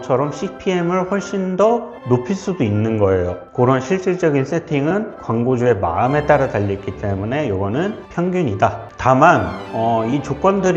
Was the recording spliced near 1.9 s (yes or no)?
no